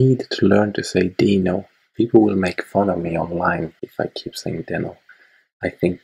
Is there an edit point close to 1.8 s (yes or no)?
yes